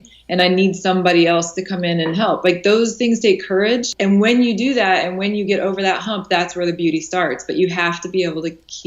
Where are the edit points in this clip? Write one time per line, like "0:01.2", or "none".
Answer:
0:03.9